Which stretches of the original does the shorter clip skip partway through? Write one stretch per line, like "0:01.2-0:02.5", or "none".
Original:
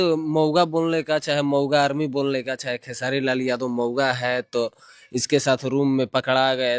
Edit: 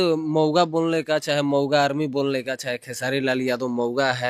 none